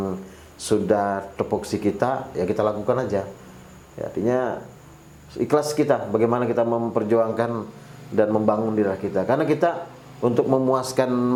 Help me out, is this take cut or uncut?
uncut